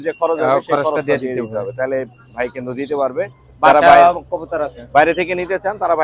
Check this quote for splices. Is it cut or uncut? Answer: uncut